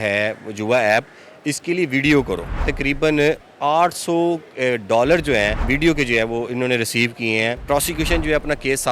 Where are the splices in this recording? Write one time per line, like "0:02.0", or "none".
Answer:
0:02.6
0:05.6
0:07.6